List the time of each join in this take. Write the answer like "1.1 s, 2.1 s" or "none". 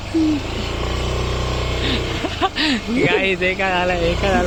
none